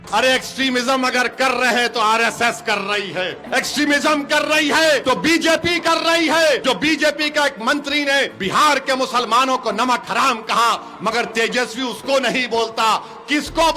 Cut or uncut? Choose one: cut